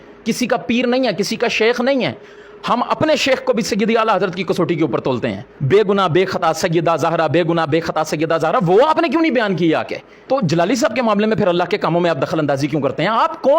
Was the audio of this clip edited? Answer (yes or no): yes